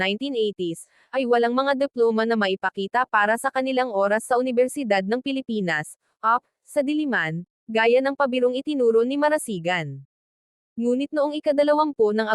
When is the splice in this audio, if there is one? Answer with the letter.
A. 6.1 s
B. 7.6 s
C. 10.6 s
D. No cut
C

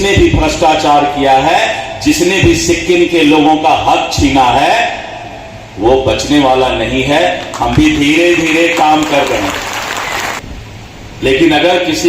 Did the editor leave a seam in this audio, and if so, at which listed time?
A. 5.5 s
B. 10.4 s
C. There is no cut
B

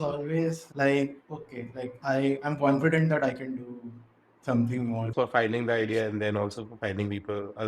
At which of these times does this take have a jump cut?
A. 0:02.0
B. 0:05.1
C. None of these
B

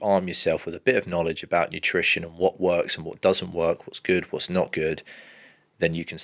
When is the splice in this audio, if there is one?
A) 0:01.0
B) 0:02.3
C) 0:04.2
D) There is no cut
D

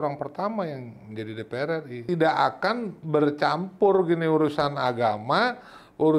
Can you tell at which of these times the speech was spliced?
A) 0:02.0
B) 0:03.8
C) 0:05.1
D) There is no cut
A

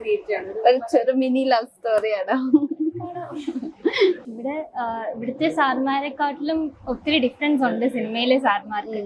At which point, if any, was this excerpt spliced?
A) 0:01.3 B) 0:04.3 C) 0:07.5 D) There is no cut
B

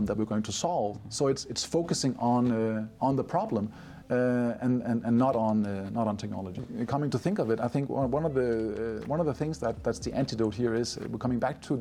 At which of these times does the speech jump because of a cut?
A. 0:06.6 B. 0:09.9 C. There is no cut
A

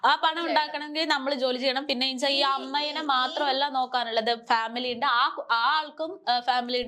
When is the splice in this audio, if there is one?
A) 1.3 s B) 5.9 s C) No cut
C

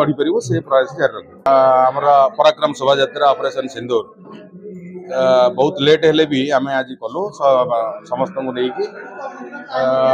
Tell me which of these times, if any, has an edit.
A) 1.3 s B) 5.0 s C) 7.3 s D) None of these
A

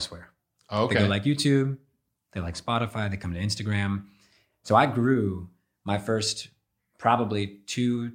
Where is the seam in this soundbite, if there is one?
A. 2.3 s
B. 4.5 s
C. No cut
B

